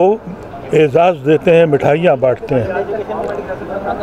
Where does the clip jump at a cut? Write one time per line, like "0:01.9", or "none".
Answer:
none